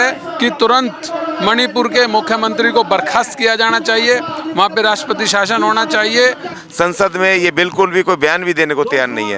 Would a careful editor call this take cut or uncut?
cut